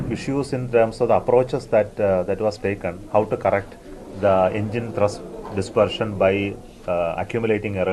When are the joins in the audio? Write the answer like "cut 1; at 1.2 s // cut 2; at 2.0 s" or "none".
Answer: none